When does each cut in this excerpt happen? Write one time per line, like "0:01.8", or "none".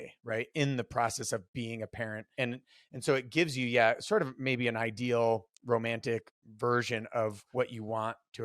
0:02.3
0:06.4
0:07.4